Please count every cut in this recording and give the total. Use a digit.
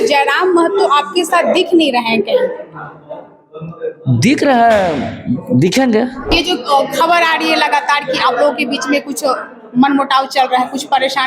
1